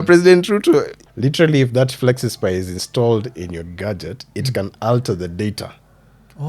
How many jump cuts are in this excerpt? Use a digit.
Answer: 1